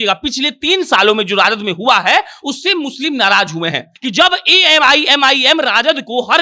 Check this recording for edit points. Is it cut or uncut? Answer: cut